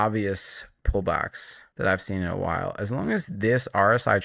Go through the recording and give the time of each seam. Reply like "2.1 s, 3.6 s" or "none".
none